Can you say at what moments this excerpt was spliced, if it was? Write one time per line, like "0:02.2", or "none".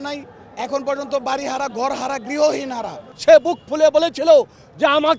0:03.0